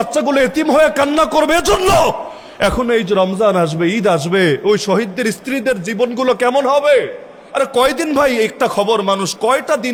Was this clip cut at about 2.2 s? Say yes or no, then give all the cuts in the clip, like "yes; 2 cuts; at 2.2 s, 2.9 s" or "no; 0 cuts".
no; 0 cuts